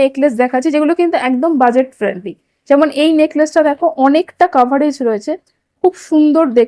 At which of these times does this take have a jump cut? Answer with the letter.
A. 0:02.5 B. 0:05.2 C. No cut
C